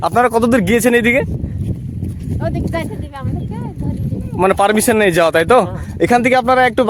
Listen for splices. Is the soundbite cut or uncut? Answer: uncut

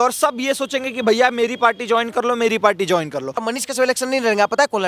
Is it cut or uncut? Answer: cut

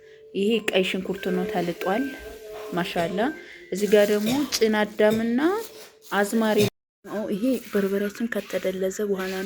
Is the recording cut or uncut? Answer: cut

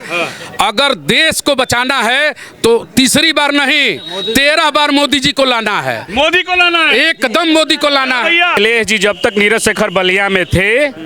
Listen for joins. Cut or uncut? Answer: cut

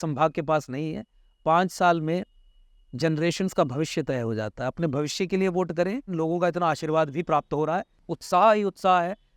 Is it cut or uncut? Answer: cut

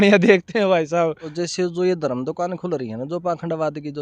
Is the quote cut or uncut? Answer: cut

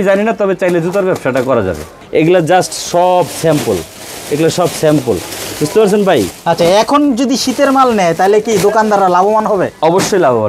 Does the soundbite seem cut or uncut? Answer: cut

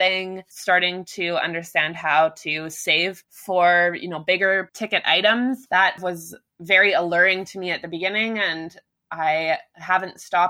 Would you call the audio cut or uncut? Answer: cut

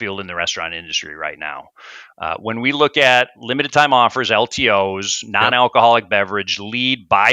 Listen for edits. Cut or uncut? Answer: uncut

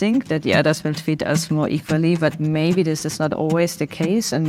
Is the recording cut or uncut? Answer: uncut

